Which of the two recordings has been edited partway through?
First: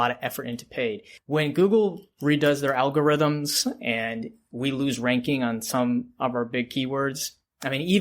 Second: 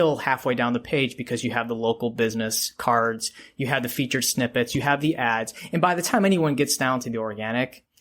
first; 1 cut; at 1.1 s

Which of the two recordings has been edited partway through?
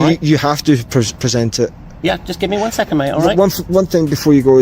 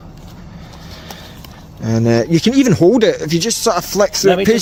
first; 1 cut; at 2.1 s

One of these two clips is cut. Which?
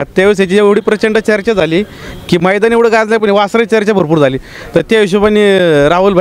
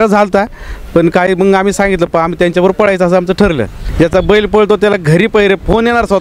second; 1 cut; at 3.8 s

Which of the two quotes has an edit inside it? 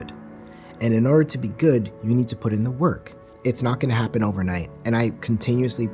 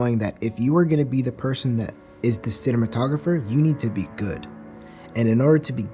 first; 1 cut; at 3.3 s

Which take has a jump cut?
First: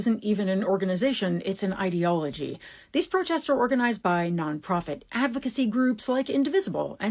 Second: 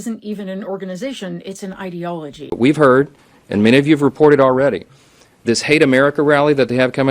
second; 1 cut; at 2.4 s

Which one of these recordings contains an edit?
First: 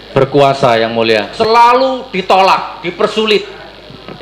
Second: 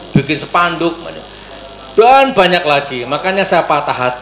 first; 1 cut; at 1.3 s

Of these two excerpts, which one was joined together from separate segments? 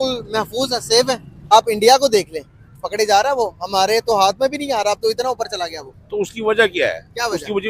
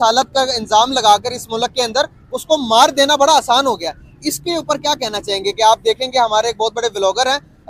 first; 1 cut; at 1.4 s

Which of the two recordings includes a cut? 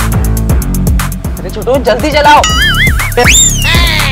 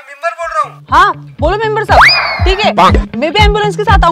first; 1 cut; at 3.1 s

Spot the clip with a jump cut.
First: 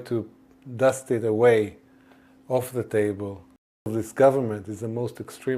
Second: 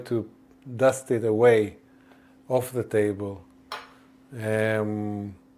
first; 1 cut; at 3.9 s

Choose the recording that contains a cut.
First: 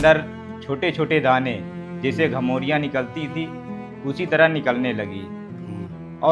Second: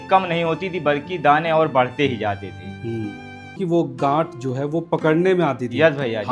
second; 1 cut; at 3.5 s

